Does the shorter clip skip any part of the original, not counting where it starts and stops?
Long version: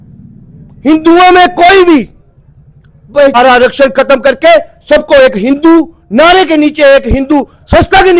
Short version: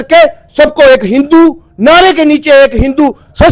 no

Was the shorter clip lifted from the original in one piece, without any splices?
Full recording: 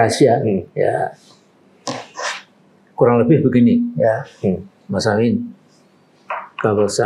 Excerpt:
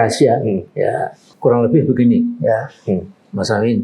no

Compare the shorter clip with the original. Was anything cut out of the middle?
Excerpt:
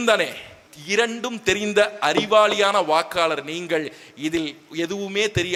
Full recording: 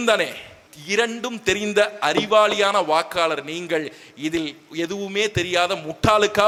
no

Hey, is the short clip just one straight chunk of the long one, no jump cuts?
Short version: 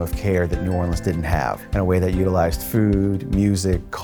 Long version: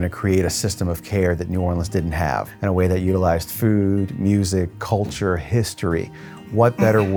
yes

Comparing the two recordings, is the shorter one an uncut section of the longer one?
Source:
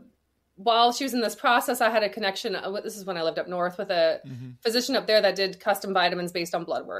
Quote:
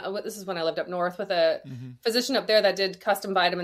yes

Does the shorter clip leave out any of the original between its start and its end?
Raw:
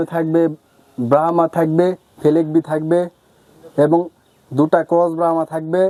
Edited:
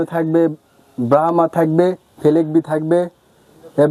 no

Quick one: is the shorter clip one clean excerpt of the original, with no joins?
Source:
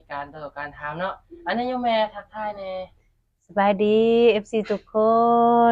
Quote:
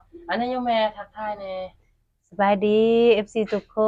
yes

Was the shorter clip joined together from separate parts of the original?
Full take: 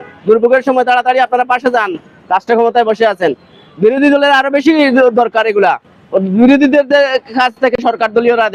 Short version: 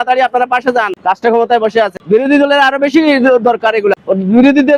yes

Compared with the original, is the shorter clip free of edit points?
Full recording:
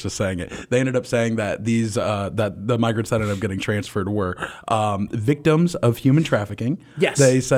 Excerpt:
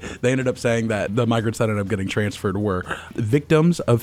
no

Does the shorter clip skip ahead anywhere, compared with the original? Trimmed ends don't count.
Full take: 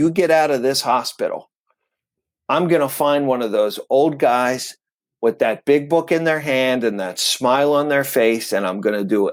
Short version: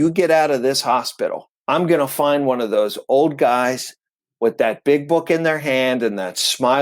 yes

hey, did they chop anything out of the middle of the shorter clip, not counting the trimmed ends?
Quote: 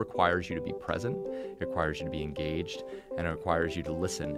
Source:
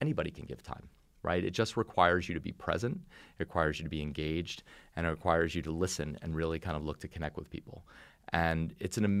no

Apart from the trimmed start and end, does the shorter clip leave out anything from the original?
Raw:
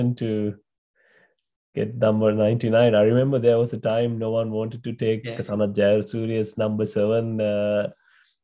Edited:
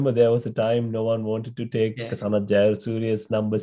no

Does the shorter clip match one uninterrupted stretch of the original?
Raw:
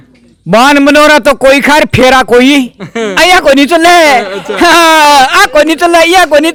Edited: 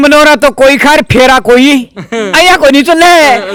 yes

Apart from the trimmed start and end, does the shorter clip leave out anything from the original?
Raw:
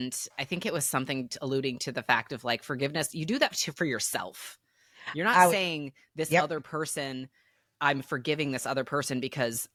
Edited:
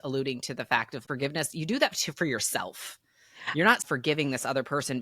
yes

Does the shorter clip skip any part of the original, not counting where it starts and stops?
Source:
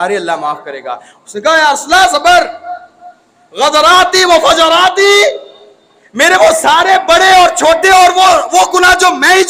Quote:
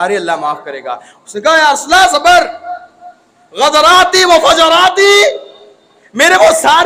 no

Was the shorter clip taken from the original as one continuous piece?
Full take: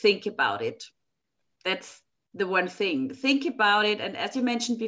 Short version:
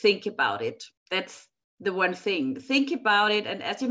no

